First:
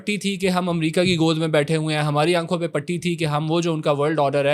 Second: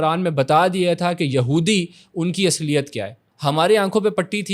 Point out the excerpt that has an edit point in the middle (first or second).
second